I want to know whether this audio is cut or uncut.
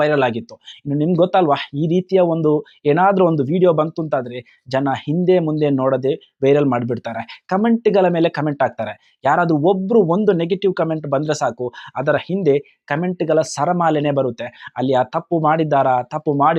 uncut